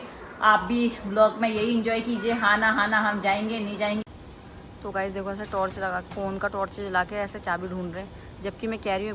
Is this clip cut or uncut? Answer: cut